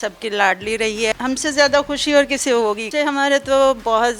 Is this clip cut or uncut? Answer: cut